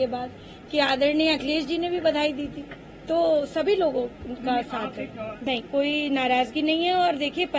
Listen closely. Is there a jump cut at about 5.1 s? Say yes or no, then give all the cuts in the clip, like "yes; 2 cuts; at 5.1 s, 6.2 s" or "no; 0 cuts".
yes; 1 cut; at 5.1 s